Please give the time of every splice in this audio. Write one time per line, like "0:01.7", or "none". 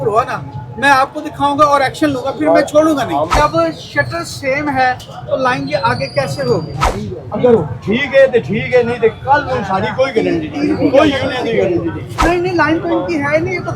0:03.3
0:06.8
0:12.1